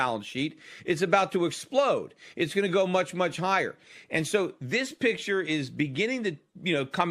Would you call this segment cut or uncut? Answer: cut